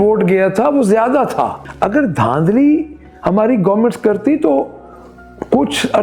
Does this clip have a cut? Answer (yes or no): yes